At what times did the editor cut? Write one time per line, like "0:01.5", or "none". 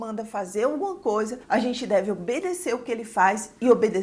none